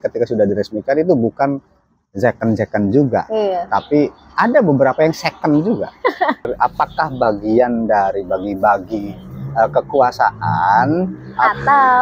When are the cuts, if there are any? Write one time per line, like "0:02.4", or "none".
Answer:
0:06.5